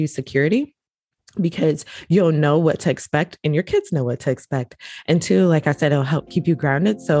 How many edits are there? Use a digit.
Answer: 0